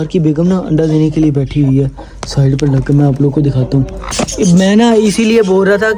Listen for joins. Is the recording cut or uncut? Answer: uncut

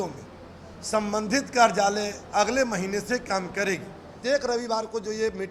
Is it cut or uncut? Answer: cut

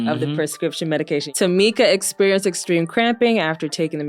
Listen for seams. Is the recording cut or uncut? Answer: cut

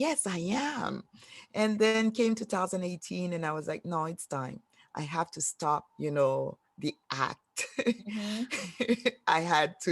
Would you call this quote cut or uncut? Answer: cut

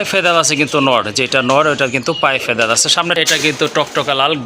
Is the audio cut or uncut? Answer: cut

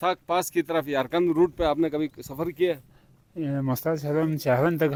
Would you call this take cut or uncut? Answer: uncut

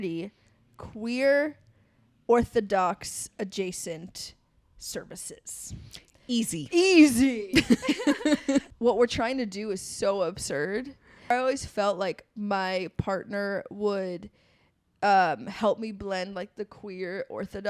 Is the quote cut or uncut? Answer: cut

